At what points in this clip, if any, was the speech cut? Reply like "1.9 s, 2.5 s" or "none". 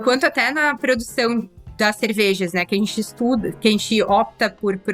none